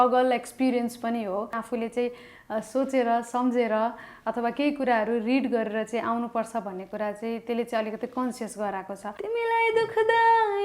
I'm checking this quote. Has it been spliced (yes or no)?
yes